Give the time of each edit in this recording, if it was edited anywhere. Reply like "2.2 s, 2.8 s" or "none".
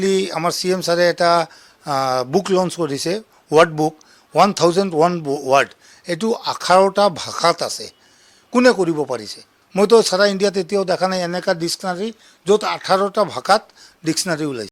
none

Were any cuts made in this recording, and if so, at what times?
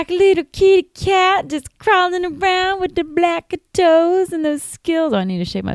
none

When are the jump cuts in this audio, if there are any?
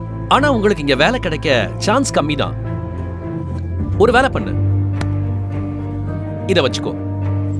none

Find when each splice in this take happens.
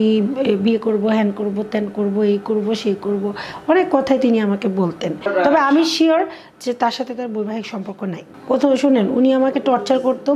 5.1 s, 8.4 s

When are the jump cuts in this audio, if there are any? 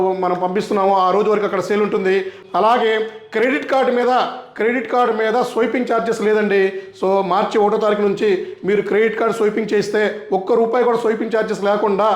2.4 s

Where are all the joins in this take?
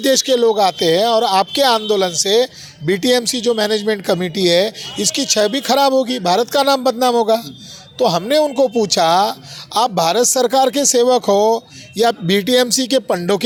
none

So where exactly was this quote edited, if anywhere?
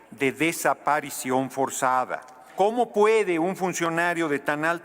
2.5 s

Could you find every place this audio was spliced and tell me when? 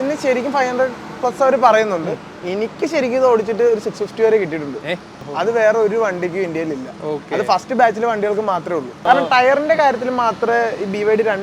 5.2 s, 9.0 s

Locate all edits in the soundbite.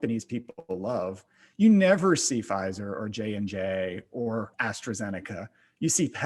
4.6 s

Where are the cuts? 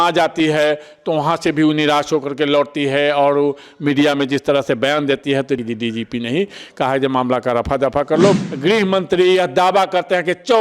5.6 s, 8.4 s

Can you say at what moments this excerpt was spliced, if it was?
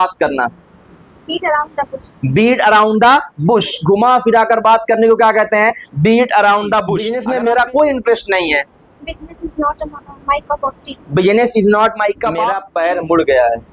7.1 s, 12.6 s

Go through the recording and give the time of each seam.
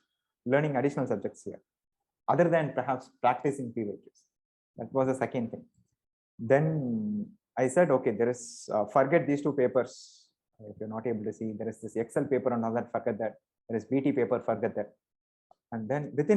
none

